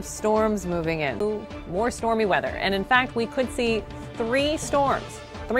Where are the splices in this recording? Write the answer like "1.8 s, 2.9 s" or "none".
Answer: 1.2 s